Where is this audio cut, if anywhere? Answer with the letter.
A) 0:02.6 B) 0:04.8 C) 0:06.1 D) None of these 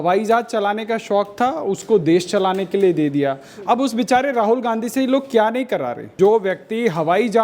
C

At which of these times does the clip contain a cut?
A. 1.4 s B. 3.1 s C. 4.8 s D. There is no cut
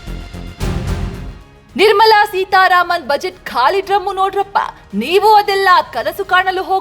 A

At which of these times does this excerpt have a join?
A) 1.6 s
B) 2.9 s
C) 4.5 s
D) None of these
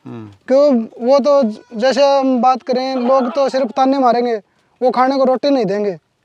D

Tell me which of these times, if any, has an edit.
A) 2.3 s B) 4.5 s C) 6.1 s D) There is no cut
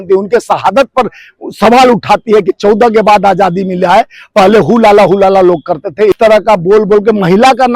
C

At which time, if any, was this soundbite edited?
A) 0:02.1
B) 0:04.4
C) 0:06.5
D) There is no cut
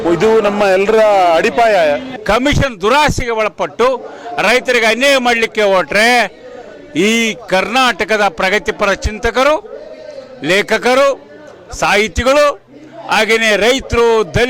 A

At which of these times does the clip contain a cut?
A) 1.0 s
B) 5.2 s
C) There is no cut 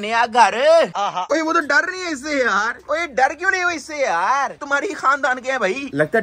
A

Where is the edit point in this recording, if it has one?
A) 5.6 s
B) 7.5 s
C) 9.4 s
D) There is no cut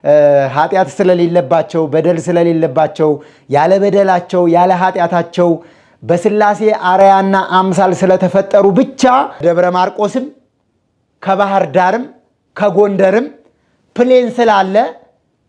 C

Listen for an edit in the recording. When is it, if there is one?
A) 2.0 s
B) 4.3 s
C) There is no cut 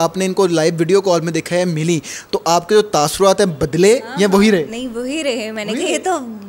C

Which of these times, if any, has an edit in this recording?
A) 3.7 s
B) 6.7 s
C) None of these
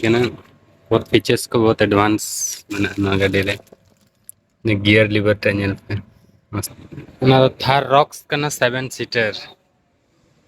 B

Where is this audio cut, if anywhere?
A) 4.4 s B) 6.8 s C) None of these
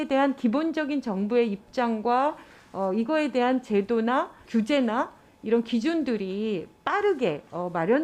A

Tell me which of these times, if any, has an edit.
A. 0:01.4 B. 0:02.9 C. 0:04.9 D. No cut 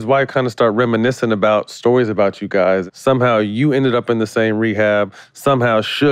B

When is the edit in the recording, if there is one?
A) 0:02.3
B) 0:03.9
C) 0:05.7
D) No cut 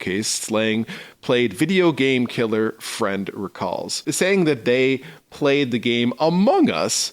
B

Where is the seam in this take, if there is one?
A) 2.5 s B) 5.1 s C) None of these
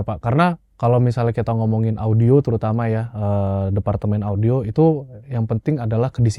C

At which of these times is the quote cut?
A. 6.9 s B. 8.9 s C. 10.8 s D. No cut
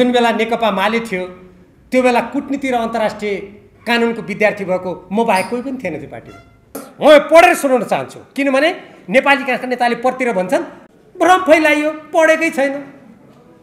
A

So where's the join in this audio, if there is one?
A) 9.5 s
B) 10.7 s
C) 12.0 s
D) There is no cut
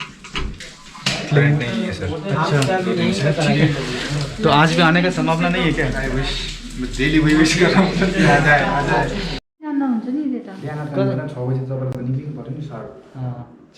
A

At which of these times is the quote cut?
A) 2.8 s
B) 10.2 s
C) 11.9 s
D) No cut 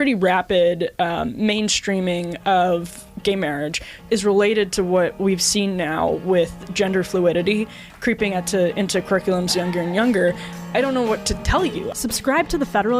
C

